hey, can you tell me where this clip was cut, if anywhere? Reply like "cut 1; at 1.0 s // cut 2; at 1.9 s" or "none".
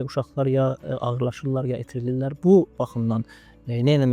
none